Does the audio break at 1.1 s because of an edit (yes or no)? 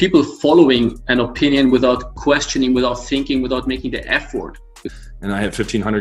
no